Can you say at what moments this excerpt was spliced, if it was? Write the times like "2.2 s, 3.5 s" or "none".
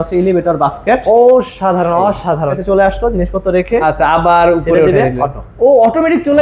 2.5 s